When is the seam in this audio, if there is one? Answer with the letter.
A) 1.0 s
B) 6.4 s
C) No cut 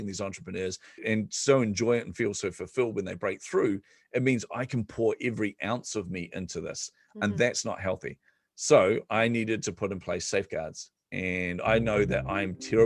A